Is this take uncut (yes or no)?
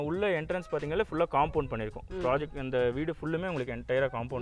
yes